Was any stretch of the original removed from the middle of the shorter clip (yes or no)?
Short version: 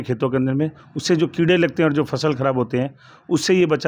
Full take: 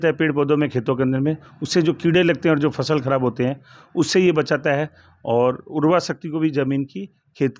no